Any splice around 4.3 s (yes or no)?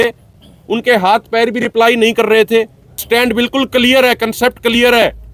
no